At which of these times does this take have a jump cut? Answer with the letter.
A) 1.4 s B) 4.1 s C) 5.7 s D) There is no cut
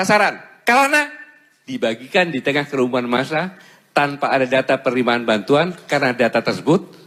D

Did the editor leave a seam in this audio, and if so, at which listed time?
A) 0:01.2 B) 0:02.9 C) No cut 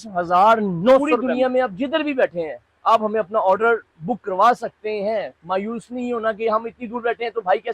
A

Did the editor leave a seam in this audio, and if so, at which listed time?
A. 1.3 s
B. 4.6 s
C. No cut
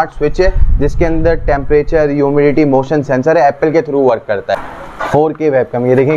B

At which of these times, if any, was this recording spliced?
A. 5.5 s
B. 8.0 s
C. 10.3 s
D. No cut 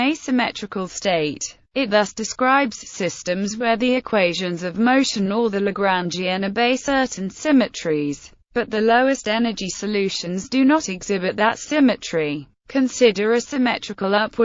A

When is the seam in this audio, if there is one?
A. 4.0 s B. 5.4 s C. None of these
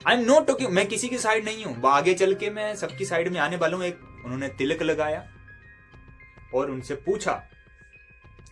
A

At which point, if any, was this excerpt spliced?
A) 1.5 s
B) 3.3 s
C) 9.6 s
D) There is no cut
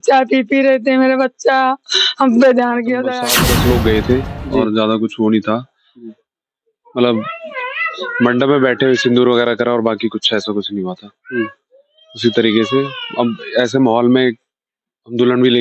B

